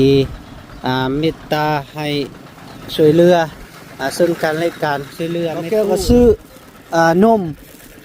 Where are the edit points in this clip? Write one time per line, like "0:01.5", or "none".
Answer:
0:05.6